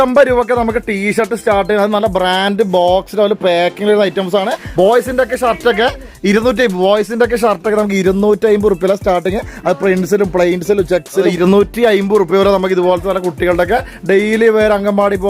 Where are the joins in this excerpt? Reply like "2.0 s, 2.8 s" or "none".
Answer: 4.6 s, 11.3 s